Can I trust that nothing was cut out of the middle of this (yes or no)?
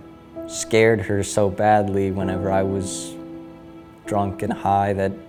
yes